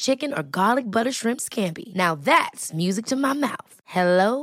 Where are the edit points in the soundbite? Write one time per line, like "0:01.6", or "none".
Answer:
none